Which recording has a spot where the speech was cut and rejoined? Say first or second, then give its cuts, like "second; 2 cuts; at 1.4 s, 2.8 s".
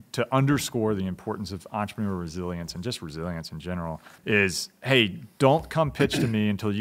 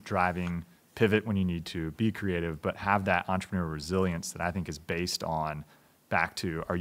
first; 1 cut; at 4.2 s